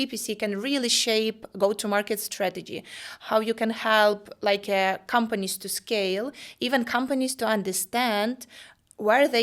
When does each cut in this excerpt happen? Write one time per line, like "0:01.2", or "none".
none